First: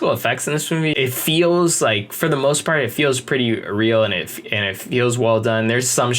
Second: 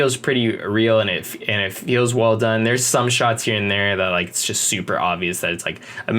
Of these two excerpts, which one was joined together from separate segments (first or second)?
first